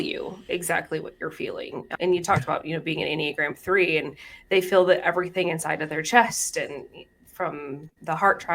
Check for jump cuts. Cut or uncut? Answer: cut